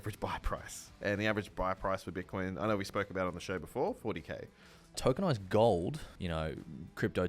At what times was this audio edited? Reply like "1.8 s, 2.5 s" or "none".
5.0 s, 6.1 s